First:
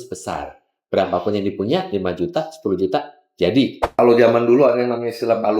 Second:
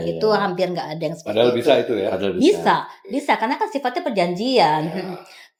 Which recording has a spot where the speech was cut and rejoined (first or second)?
first